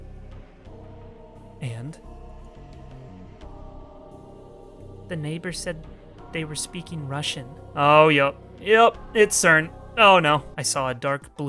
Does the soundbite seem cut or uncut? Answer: cut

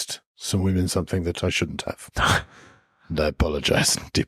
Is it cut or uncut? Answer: uncut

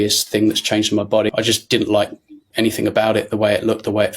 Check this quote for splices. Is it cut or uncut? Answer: cut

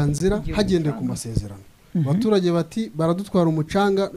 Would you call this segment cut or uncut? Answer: uncut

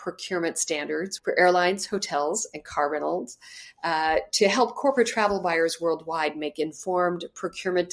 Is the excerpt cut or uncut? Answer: cut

